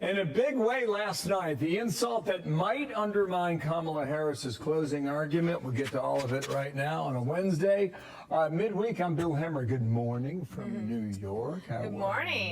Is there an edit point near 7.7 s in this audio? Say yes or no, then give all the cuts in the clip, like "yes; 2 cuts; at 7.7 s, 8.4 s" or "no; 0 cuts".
no; 1 cut; at 1.5 s